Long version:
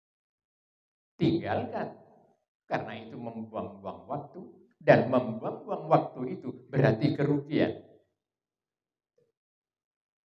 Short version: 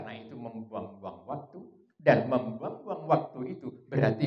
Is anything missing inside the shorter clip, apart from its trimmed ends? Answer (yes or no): no